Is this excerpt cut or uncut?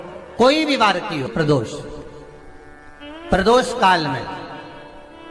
cut